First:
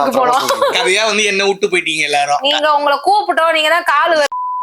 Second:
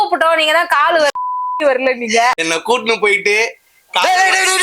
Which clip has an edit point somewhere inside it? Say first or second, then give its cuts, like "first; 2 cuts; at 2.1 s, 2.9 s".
second; 1 cut; at 2.4 s